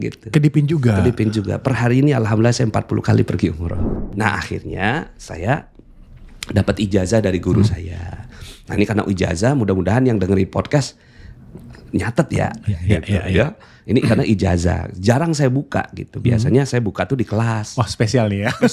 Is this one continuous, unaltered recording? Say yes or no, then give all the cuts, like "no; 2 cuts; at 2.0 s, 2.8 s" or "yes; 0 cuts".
no; 1 cut; at 3.9 s